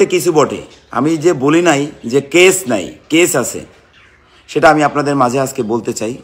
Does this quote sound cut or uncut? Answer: uncut